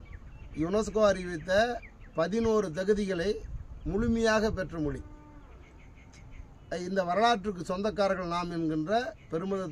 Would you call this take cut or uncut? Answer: uncut